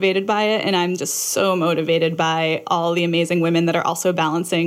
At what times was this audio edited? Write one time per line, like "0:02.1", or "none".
none